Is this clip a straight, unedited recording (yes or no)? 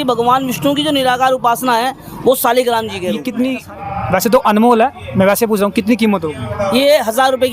no